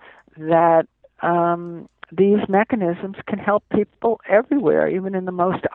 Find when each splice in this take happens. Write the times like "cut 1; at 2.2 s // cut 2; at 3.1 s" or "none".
none